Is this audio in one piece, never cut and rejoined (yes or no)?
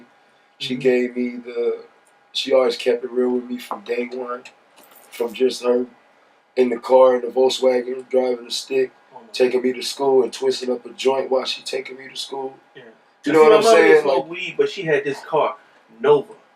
yes